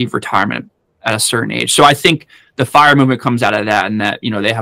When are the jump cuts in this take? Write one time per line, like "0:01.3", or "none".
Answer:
none